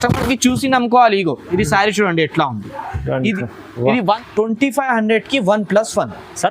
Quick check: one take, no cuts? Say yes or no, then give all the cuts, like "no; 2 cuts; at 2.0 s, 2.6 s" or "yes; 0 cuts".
no; 1 cut; at 4.2 s